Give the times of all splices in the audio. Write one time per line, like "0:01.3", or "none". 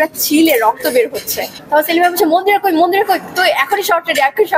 0:01.6